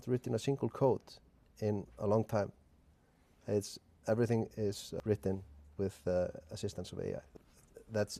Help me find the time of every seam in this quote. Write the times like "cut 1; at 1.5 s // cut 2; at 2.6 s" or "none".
cut 1; at 1.4 s // cut 2; at 5.0 s // cut 3; at 7.3 s